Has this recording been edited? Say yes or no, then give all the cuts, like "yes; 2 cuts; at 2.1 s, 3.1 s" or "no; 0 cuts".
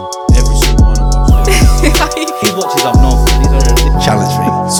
no; 0 cuts